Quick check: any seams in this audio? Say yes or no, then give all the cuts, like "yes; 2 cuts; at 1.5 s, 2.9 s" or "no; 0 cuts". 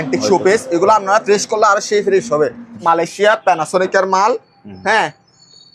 yes; 1 cut; at 2.7 s